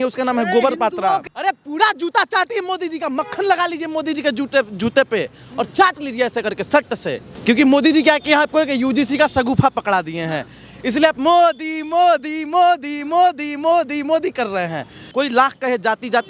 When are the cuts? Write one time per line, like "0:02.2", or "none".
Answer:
0:01.2
0:07.3
0:15.1